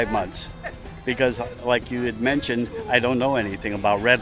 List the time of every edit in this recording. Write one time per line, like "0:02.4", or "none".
none